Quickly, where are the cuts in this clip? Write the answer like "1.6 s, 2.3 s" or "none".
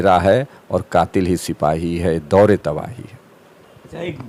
none